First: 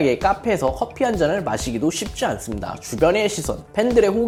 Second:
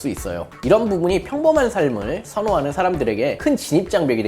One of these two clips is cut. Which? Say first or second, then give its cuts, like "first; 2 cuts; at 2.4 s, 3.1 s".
second; 1 cut; at 3.4 s